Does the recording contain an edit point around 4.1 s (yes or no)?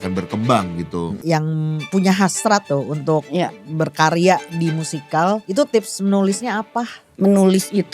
no